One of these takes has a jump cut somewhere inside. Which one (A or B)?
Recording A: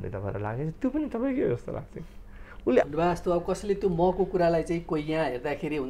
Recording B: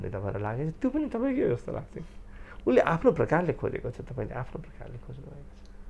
A